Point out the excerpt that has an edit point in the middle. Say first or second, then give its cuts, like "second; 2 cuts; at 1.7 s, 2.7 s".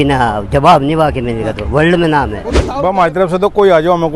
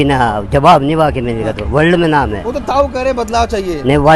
first; 1 cut; at 2.6 s